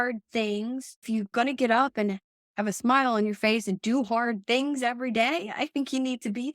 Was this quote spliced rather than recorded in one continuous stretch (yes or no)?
yes